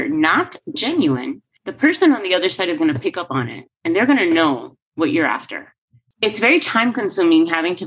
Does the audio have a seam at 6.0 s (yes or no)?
yes